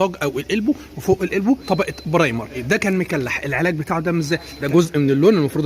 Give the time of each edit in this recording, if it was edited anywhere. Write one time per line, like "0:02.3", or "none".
0:01.6
0:02.6
0:04.5